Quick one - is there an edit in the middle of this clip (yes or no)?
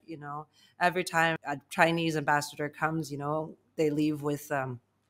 yes